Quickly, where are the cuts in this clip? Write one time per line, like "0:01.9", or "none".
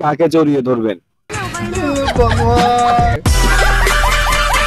0:01.2